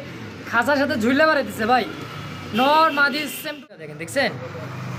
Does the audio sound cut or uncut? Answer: cut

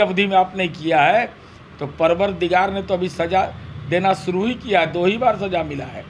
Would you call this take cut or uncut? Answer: uncut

